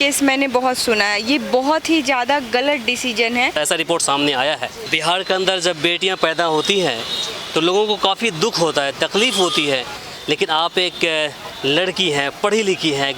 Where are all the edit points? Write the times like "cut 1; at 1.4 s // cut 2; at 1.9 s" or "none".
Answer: cut 1; at 3.5 s